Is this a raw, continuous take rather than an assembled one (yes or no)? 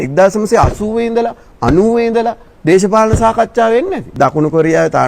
no